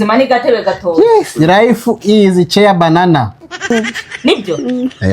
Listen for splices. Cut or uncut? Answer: cut